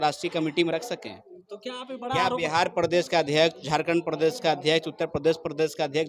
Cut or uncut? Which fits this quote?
uncut